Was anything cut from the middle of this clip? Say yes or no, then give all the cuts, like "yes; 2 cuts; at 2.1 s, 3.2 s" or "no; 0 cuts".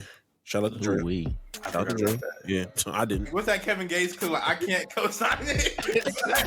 yes; 1 cut; at 3.3 s